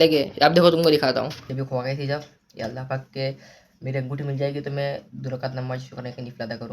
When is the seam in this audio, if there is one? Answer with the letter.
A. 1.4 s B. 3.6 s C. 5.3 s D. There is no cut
A